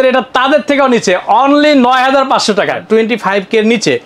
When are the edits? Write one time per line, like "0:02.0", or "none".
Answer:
0:02.8

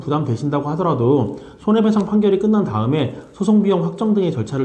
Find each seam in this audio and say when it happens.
none

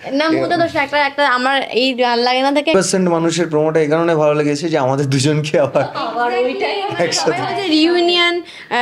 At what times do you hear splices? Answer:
0:02.7

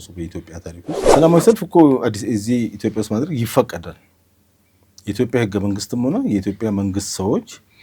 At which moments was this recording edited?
0:01.0

